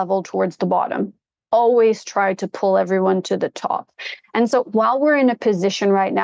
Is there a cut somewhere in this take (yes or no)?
no